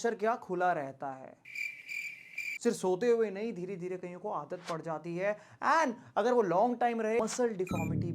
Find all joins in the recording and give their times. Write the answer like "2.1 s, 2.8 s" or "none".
7.2 s